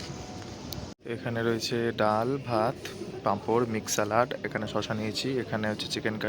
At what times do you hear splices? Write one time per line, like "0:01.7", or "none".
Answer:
0:01.0